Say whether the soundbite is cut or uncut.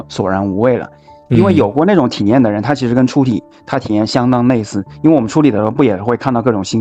uncut